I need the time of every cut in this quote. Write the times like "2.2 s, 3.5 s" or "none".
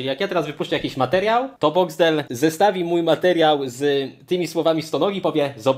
none